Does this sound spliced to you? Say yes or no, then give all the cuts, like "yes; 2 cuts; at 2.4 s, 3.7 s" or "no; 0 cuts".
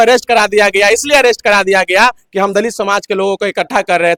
no; 0 cuts